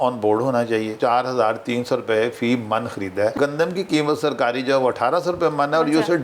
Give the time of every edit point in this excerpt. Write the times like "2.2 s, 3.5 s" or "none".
1.0 s, 3.3 s